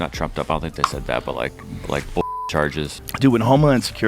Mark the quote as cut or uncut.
cut